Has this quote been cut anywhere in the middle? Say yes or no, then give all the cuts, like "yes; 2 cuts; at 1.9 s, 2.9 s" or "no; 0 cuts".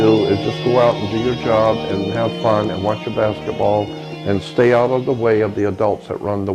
no; 0 cuts